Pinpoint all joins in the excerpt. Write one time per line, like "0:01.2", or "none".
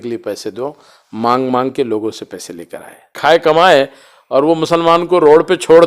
0:03.1